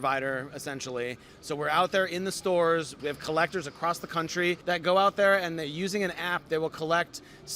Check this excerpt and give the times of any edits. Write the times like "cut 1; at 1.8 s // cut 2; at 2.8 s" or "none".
cut 1; at 1.3 s // cut 2; at 2.9 s // cut 3; at 4.6 s

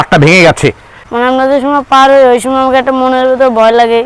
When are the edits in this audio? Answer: cut 1; at 0.9 s

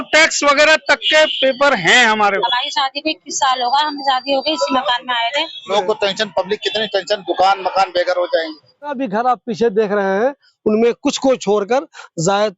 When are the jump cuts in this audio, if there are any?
cut 1; at 2.4 s // cut 2; at 5.7 s // cut 3; at 9.0 s

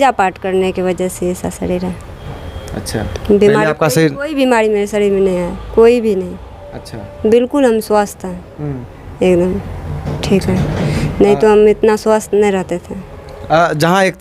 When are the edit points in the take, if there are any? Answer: none

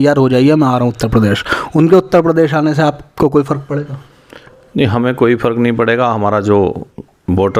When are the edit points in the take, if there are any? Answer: none

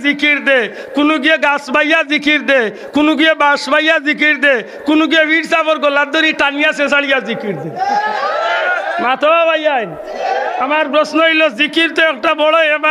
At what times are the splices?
none

